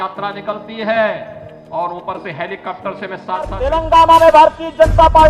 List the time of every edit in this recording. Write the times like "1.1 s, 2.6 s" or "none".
3.5 s